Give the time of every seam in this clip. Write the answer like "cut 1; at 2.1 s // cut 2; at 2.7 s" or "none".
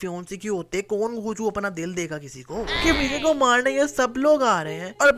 cut 1; at 2.7 s